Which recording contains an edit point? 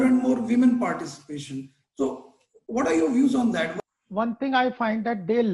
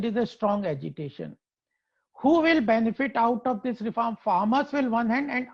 first; 1 cut; at 3.7 s

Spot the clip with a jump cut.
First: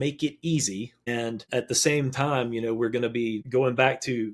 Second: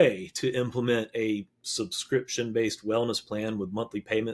first; 2 cuts; at 1.4 s, 3.4 s

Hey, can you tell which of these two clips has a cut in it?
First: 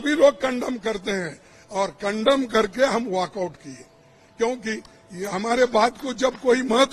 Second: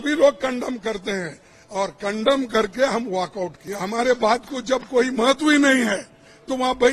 second; 1 cut; at 3.6 s

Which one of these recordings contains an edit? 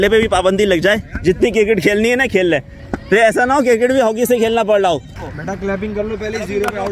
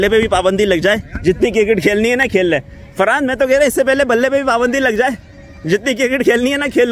first; 2 cuts; at 2.8 s, 5.1 s

